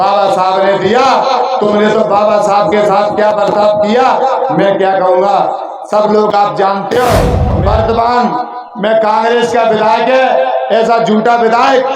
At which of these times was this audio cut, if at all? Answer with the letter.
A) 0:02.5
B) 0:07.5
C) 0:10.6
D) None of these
B